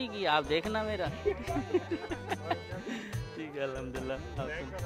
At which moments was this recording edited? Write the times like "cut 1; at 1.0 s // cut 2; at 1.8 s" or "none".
none